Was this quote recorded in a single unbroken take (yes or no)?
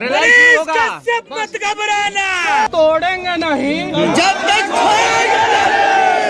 no